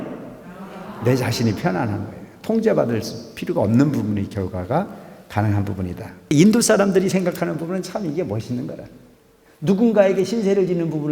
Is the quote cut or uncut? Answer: cut